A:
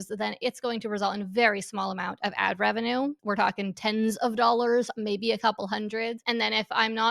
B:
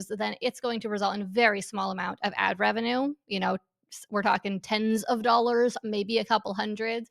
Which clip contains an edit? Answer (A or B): A